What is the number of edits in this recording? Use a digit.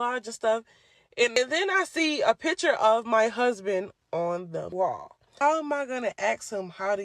2